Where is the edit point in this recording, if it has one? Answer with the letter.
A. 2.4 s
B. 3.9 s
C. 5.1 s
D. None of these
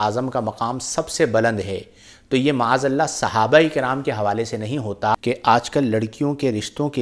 C